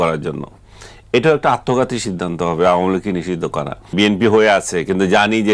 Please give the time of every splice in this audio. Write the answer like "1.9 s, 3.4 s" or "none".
3.9 s